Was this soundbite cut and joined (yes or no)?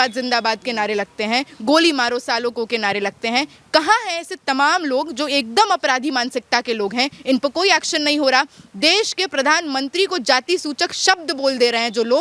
no